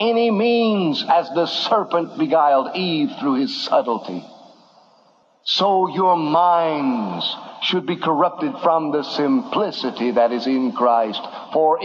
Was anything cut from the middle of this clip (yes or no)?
no